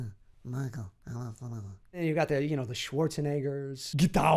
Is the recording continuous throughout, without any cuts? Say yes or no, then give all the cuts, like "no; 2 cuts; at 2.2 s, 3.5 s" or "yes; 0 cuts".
yes; 0 cuts